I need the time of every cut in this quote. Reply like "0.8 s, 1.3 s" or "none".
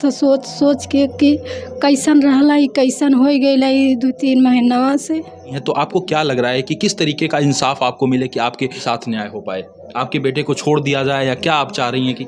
5.7 s, 8.8 s